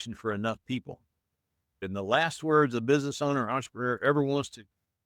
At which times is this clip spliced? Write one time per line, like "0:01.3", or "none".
0:01.8